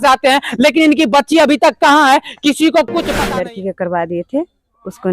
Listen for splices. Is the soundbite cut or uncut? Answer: cut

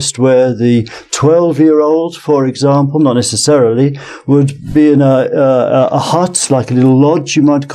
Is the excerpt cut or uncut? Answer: uncut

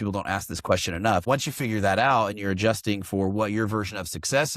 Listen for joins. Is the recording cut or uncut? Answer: cut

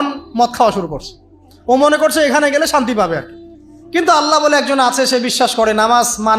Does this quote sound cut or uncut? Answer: uncut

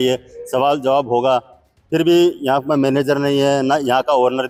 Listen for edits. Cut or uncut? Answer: uncut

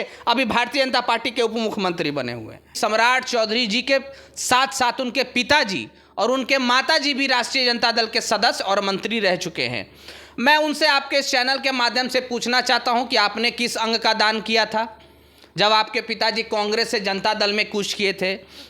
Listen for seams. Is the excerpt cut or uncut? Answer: cut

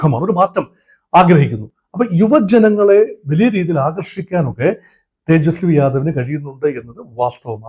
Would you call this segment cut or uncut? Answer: uncut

